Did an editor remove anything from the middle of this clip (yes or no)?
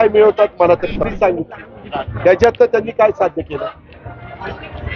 yes